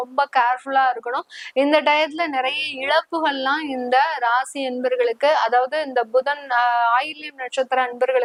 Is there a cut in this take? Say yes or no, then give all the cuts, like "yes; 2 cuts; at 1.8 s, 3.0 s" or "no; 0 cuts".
no; 0 cuts